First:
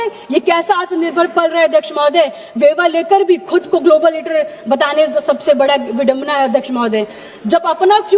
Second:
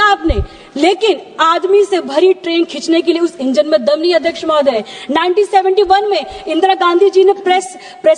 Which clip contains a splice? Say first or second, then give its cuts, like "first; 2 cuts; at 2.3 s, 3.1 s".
second; 2 cuts; at 2.4 s, 4.9 s